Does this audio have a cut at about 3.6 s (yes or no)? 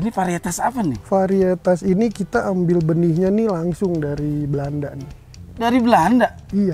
no